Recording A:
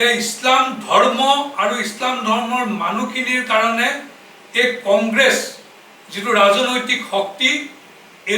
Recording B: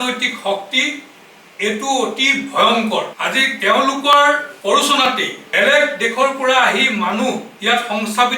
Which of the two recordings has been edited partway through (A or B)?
B